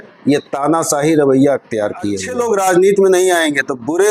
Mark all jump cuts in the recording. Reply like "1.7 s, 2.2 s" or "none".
2.2 s

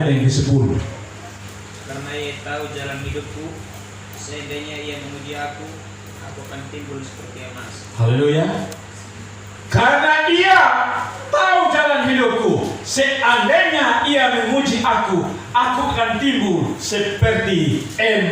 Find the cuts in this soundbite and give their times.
1.4 s

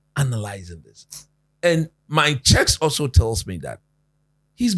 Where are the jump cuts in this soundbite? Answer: none

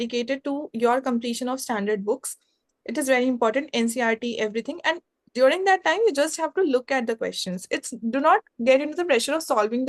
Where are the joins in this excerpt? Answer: none

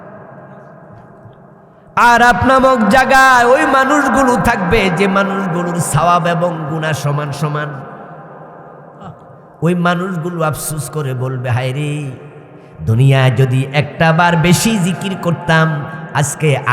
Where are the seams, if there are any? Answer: 1.9 s

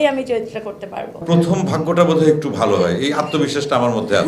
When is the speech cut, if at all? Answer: 1.2 s

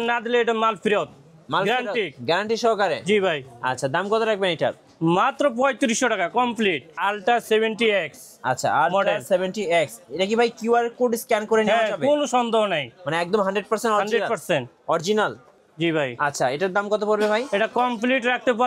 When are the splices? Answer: 7.0 s

